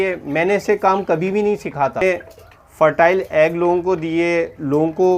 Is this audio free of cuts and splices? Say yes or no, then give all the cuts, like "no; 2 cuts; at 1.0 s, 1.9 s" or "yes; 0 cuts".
no; 1 cut; at 2.0 s